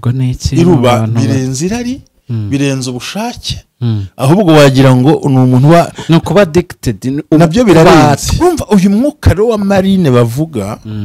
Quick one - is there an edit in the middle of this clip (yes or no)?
yes